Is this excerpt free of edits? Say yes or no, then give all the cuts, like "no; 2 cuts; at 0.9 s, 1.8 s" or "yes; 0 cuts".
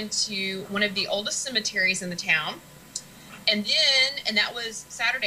no; 1 cut; at 1.6 s